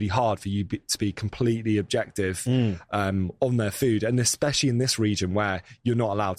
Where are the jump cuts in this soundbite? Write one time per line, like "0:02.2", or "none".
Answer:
none